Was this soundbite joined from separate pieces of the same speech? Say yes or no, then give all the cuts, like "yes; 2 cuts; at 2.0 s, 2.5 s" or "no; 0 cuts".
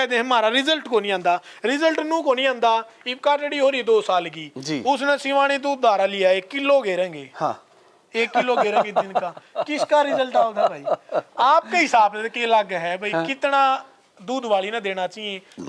no; 0 cuts